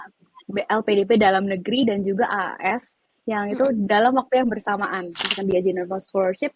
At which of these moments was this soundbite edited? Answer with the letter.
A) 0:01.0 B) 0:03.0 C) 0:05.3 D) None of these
C